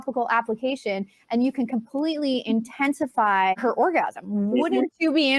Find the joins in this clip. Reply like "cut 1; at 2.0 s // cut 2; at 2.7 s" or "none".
cut 1; at 3.6 s

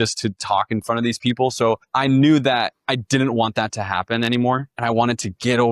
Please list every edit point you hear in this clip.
cut 1; at 1.8 s // cut 2; at 2.8 s // cut 3; at 4.7 s

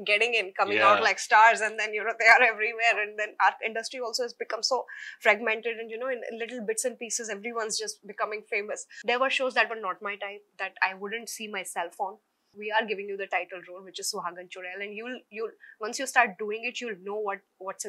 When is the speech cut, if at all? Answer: cut 1; at 8.9 s // cut 2; at 12.5 s

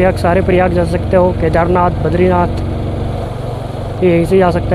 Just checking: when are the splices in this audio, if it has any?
none

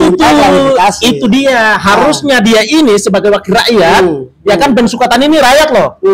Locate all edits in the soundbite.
none

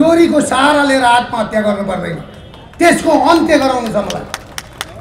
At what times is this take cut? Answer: none

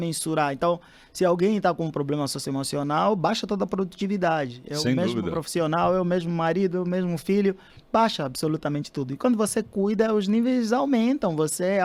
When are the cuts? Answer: none

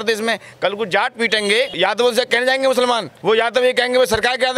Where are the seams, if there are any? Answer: cut 1; at 1.7 s // cut 2; at 3.1 s

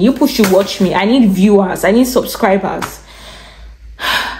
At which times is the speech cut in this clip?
none

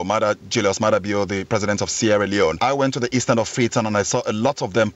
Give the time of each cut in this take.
cut 1; at 2.6 s

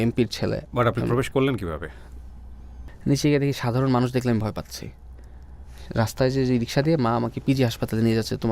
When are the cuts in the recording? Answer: cut 1; at 2.7 s

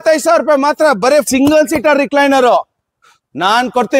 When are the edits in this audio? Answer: cut 1; at 1.3 s

